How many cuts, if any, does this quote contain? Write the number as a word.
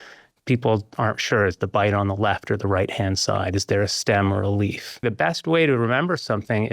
one